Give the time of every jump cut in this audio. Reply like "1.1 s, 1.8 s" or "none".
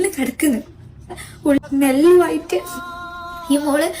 1.6 s